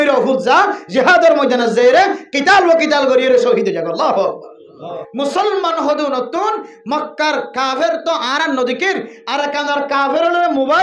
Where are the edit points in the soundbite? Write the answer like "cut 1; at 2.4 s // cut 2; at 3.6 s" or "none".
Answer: cut 1; at 5.0 s